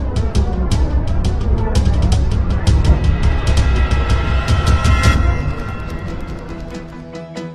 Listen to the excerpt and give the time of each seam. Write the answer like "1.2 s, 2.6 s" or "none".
5.2 s